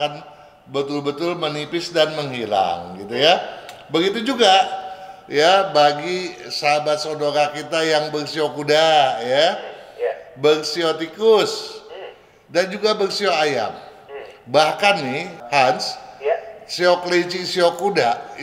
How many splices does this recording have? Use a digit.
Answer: 0